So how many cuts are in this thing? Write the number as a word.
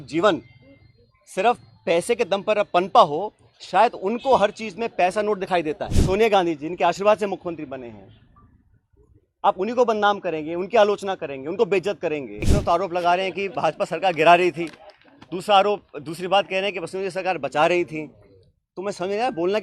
two